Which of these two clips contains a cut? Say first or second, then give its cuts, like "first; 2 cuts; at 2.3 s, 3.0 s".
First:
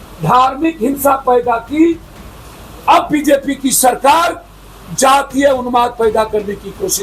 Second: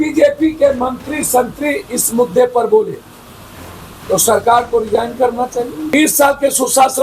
second; 1 cut; at 5.9 s